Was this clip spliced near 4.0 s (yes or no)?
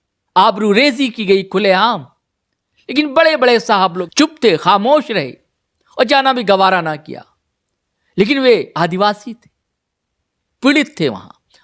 yes